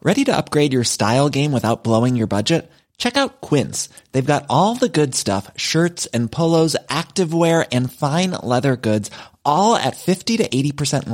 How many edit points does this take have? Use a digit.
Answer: 0